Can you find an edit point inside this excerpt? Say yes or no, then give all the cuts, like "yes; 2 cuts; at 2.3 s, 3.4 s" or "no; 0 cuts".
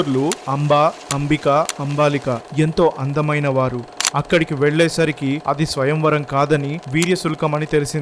yes; 1 cut; at 4.0 s